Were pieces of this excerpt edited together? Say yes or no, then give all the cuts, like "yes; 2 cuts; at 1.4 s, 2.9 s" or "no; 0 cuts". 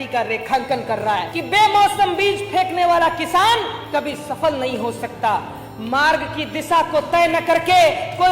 yes; 1 cut; at 1.3 s